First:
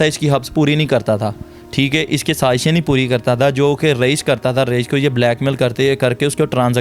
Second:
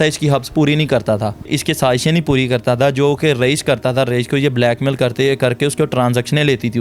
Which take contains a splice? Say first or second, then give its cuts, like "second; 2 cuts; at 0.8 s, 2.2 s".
second; 1 cut; at 1.5 s